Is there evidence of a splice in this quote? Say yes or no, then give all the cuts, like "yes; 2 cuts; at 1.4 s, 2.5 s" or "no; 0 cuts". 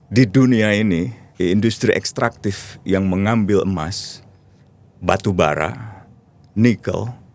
yes; 1 cut; at 1.2 s